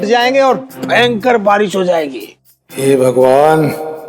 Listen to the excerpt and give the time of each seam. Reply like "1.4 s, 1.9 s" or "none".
2.2 s